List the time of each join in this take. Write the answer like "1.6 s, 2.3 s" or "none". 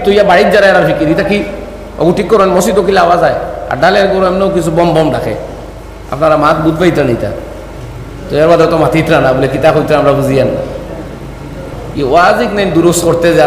11.7 s